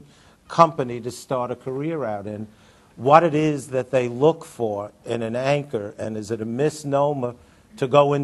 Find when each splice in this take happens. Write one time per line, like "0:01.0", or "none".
0:06.0